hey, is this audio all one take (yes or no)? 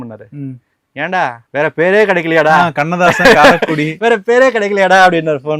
yes